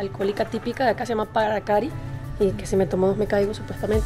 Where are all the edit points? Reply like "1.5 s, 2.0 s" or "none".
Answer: none